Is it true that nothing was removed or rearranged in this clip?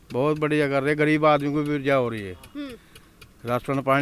yes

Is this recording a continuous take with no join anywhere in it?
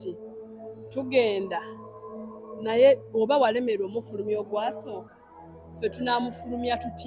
yes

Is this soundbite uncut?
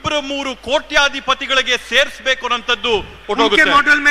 no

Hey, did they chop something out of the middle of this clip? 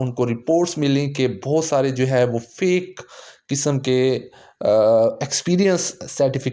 no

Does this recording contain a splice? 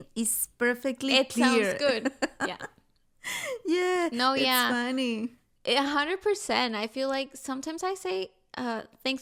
no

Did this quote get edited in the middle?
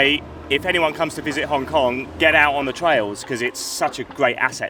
no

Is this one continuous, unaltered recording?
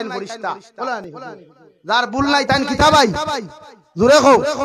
yes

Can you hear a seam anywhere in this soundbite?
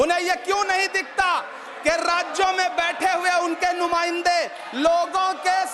no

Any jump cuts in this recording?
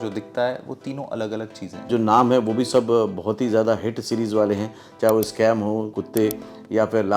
yes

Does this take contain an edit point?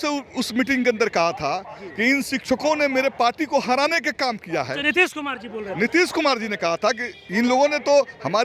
no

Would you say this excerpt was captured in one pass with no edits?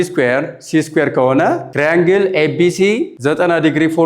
no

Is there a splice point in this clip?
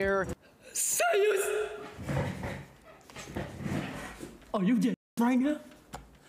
no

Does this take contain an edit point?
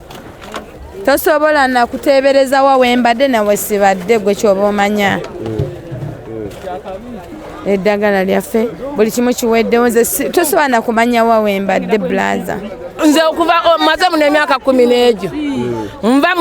yes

